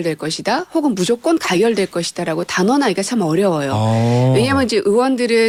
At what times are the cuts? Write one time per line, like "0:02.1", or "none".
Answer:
none